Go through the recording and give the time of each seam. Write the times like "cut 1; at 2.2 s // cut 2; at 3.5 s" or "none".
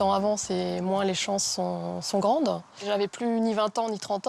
cut 1; at 2.7 s